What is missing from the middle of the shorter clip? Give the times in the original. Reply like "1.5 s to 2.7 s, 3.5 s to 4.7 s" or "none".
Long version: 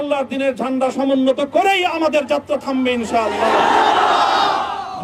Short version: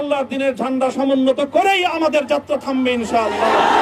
none